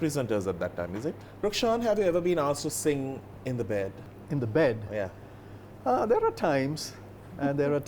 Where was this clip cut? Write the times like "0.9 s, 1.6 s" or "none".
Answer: 1.3 s, 3.3 s, 4.1 s